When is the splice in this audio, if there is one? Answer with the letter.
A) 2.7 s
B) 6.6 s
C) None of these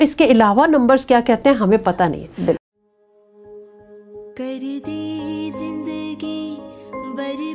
A